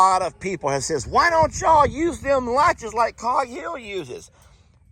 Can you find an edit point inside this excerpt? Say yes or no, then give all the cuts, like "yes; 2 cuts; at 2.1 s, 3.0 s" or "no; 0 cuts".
no; 0 cuts